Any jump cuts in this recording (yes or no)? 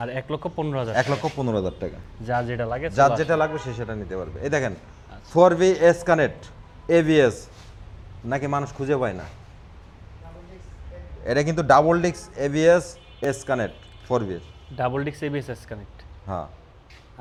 no